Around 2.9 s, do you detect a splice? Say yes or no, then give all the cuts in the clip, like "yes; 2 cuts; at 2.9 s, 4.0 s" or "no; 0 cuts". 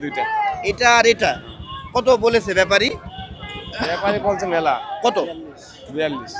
no; 0 cuts